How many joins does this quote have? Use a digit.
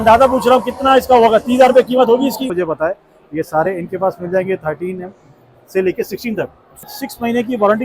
2